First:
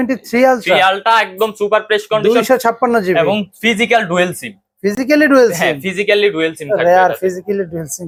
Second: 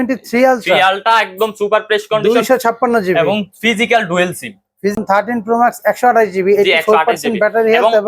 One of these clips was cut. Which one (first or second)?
second